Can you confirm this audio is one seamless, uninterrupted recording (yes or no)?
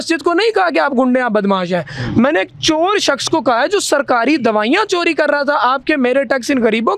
yes